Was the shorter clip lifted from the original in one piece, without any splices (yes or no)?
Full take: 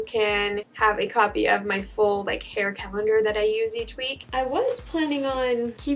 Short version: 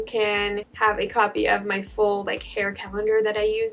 yes